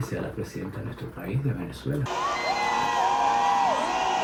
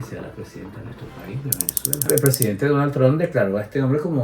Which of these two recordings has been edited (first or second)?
second